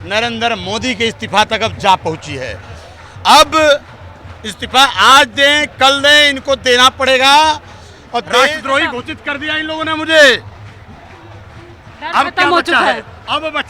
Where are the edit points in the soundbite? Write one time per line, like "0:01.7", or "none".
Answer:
0:08.5